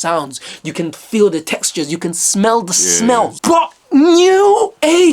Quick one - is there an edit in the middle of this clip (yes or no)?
yes